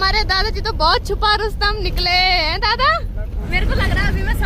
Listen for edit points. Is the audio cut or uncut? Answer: cut